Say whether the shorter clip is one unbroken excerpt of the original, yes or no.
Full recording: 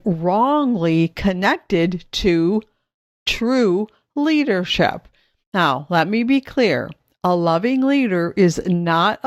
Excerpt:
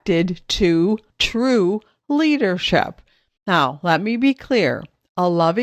no